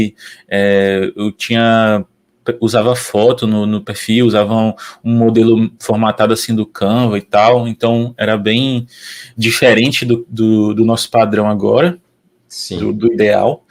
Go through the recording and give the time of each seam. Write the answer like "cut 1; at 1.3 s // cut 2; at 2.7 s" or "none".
none